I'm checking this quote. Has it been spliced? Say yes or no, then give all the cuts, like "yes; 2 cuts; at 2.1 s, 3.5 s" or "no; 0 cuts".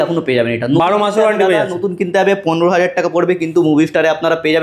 no; 0 cuts